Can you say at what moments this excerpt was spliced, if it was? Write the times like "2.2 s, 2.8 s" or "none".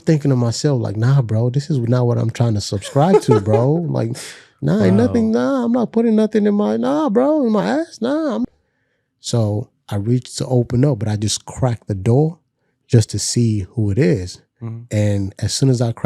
8.4 s